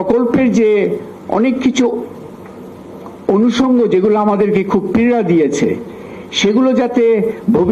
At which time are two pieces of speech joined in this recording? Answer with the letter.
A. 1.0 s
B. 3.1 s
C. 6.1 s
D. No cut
D